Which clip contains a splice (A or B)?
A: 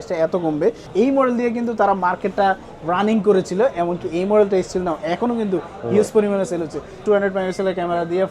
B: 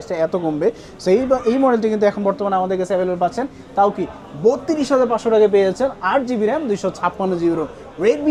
A